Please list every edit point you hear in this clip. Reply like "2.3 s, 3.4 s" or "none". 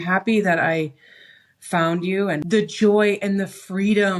2.5 s